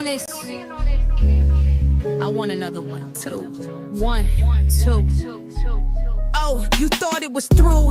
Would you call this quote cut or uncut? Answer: cut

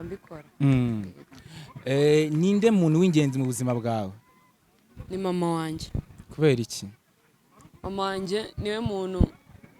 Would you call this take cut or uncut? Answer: uncut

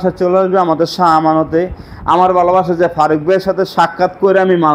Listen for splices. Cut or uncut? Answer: uncut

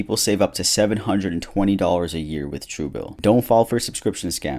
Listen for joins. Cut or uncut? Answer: cut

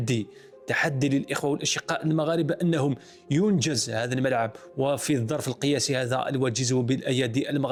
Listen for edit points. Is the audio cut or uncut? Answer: uncut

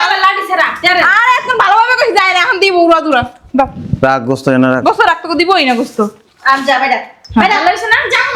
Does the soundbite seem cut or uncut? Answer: uncut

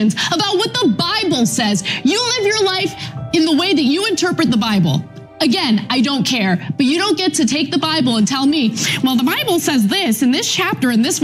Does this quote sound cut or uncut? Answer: uncut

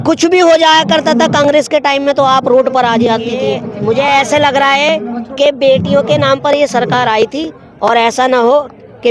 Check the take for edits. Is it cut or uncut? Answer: cut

